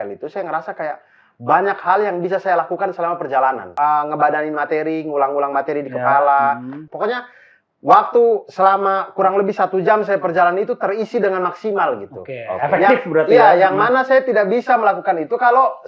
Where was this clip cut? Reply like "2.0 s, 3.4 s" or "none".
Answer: 3.7 s, 6.8 s